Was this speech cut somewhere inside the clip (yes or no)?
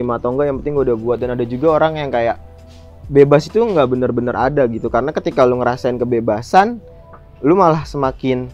no